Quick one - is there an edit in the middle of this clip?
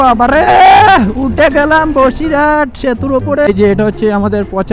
yes; 1 cut; at 3.5 s

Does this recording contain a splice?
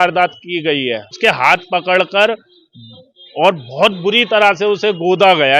yes; 1 cut; at 1.2 s

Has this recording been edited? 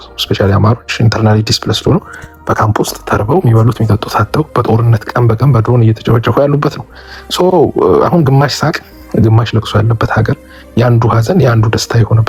no; 0 cuts

